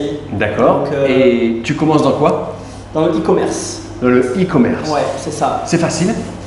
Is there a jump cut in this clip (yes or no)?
no